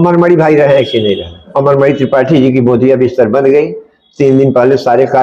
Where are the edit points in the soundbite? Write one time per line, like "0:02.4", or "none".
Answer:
0:01.5